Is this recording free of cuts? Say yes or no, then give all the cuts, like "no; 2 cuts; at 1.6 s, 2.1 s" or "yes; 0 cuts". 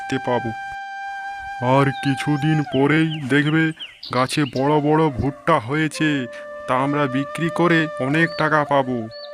yes; 0 cuts